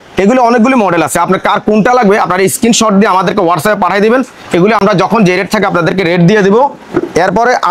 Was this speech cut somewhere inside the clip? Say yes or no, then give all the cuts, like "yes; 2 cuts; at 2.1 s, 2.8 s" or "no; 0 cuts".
no; 0 cuts